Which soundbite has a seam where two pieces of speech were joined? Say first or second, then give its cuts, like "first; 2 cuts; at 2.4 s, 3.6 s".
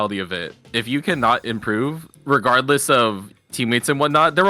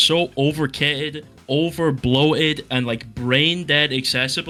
first; 1 cut; at 3.3 s